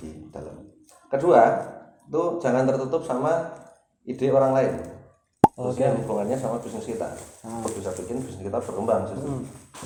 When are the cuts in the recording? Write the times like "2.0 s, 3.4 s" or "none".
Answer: none